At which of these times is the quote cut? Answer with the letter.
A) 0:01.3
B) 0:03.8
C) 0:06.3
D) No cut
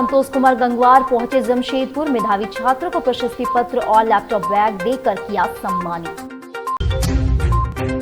D